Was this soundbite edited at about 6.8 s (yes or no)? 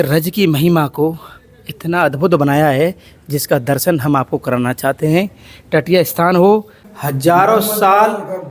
yes